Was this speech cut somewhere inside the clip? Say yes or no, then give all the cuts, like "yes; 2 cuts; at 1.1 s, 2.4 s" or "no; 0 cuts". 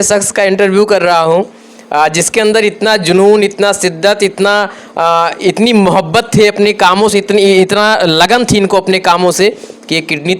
no; 0 cuts